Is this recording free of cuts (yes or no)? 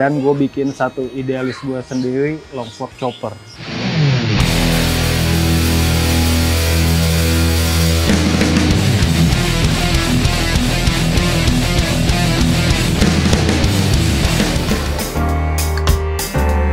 yes